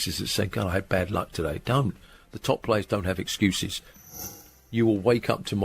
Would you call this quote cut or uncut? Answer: cut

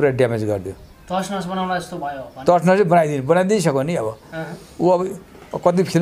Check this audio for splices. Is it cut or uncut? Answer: uncut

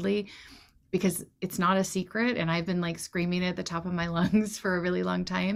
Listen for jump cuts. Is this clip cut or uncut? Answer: uncut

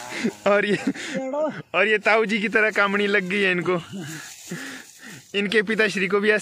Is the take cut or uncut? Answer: uncut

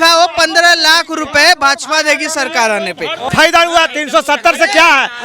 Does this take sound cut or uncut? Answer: cut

